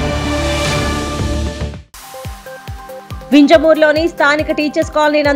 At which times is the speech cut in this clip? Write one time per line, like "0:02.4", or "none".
0:02.4